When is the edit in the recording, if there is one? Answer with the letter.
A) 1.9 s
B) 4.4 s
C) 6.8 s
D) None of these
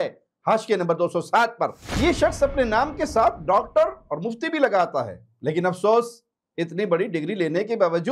A